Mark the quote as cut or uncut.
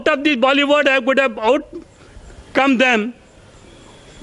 uncut